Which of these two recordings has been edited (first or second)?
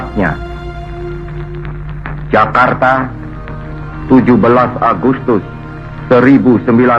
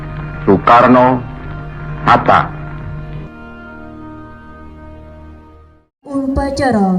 second